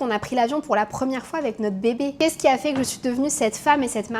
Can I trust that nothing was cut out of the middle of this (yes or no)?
yes